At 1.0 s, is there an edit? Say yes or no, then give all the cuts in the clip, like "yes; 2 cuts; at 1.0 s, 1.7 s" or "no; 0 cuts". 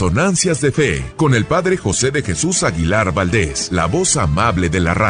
yes; 2 cuts; at 1.0 s, 3.6 s